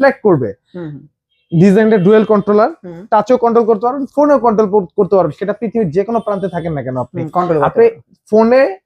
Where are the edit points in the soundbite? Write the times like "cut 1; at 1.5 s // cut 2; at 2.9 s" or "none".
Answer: none